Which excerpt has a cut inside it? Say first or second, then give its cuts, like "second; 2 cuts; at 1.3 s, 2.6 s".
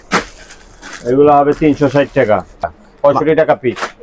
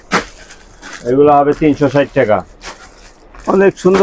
first; 1 cut; at 2.8 s